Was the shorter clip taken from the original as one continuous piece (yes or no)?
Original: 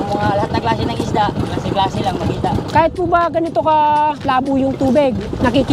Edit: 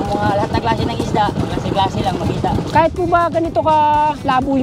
yes